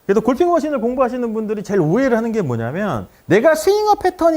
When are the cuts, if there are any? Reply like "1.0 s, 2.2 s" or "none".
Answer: none